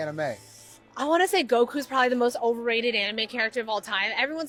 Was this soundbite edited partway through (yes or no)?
no